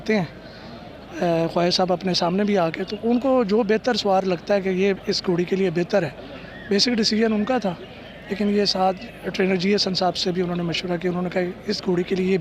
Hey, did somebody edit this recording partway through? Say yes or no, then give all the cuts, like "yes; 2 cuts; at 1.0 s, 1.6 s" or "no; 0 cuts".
no; 0 cuts